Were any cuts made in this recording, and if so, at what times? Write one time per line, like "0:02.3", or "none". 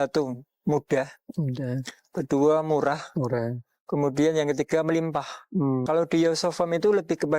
0:05.8